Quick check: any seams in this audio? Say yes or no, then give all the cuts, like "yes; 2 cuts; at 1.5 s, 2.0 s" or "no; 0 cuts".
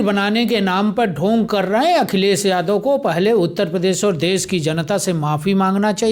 no; 0 cuts